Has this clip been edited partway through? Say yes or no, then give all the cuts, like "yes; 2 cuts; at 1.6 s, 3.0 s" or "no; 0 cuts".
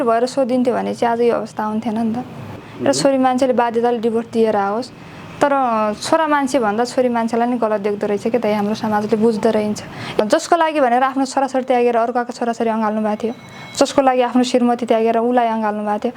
yes; 2 cuts; at 2.7 s, 10.2 s